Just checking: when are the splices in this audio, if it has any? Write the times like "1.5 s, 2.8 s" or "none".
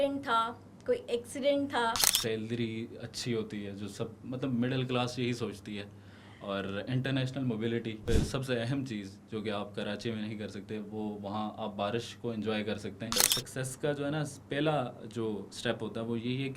2.1 s, 8.0 s, 13.2 s, 15.5 s